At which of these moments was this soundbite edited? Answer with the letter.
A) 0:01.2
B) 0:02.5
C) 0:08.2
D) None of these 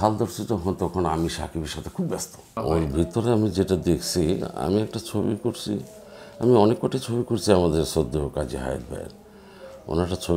B